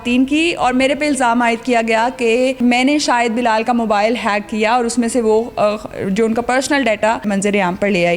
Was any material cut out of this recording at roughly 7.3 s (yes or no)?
yes